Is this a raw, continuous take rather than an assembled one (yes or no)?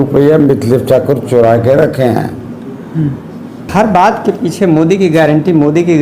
no